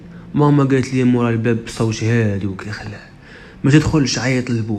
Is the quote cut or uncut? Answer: uncut